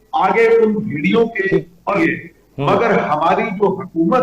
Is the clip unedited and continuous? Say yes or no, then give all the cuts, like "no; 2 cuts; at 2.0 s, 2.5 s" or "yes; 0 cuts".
no; 1 cut; at 2.0 s